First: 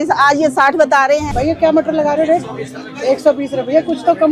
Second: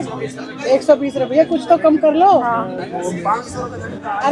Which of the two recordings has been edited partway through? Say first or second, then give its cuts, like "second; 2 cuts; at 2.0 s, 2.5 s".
first; 1 cut; at 1.2 s